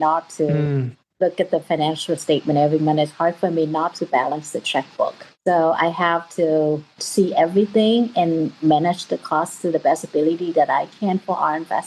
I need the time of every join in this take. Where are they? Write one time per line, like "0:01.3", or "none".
0:05.2
0:06.9